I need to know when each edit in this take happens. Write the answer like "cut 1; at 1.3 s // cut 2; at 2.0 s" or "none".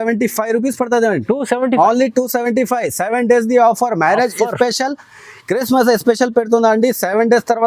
none